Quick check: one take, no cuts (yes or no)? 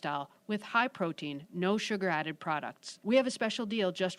yes